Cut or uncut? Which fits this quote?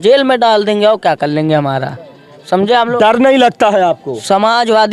uncut